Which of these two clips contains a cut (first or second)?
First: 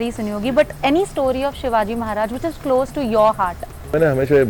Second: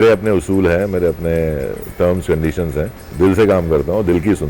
second